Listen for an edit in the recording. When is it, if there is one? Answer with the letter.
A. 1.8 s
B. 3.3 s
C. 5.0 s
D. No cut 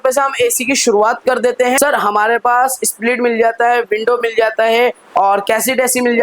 A